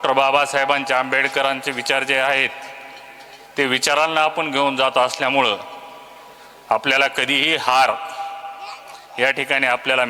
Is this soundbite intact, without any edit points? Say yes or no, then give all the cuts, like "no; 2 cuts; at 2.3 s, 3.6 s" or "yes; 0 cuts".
yes; 0 cuts